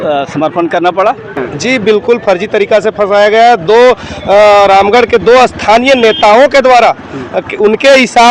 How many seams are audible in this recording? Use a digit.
1